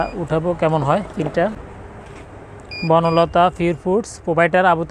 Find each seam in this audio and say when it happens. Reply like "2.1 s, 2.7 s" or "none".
1.6 s